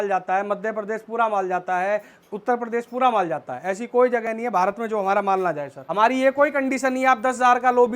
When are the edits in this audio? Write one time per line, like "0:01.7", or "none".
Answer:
0:05.8